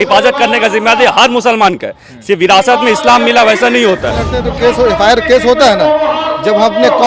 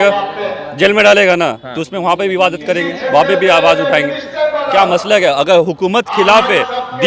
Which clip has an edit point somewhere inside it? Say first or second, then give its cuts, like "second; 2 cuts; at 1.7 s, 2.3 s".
first; 1 cut; at 4.3 s